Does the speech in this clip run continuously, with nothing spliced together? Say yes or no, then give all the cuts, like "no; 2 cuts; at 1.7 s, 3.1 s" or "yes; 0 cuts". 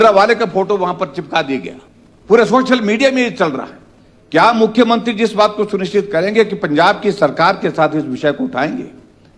yes; 0 cuts